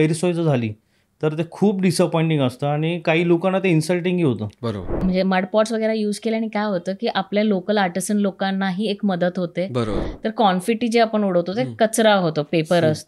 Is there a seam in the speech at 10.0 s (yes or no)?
yes